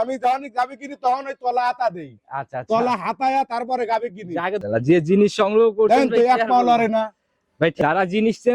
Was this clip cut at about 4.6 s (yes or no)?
yes